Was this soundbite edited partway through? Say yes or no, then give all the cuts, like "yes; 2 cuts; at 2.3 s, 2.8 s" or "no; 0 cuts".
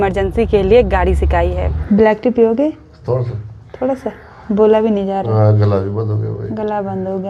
yes; 1 cut; at 1.7 s